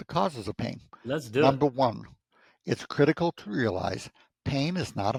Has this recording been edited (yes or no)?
no